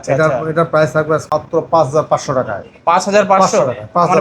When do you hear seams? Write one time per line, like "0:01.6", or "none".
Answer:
0:01.3